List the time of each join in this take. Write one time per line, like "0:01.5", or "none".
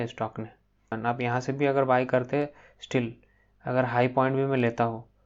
0:00.9